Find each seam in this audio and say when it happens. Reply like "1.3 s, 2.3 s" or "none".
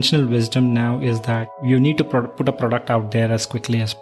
1.6 s

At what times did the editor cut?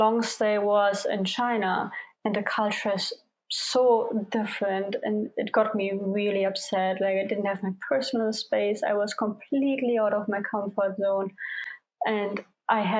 none

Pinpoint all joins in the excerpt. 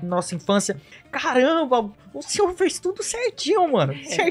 0.9 s

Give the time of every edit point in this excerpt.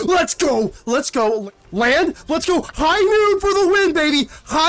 1.4 s

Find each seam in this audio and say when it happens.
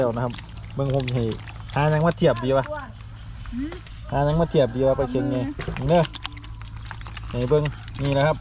none

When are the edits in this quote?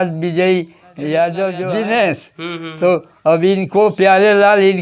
1.6 s

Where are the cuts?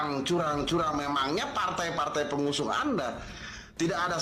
none

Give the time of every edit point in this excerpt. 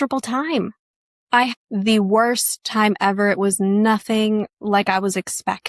1.5 s

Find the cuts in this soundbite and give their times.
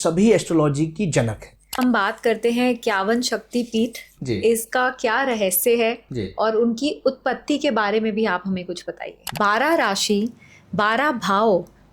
1.8 s, 9.3 s

